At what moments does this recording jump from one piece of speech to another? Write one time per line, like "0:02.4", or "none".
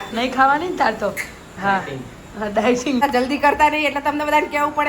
0:03.0